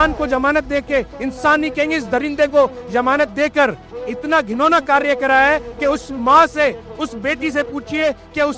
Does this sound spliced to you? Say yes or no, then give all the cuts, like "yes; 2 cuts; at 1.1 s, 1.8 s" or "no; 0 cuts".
no; 0 cuts